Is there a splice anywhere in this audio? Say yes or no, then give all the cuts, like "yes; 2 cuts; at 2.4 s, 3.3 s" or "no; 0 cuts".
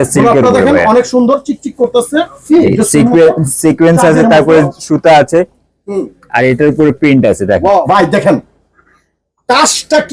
yes; 1 cut; at 7.8 s